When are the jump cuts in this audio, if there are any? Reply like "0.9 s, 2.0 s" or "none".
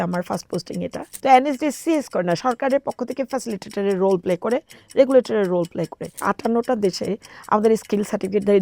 1.1 s, 6.2 s